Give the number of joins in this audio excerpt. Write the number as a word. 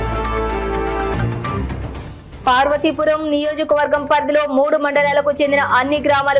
one